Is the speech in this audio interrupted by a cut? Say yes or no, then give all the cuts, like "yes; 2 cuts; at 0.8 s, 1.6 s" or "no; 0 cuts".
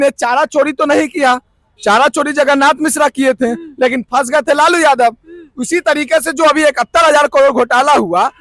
no; 0 cuts